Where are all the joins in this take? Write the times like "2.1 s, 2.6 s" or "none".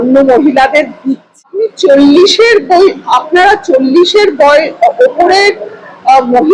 1.4 s